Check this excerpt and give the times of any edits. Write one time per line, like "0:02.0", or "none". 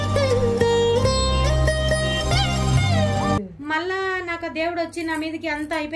0:03.4